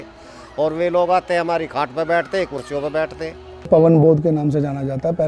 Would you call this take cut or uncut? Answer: cut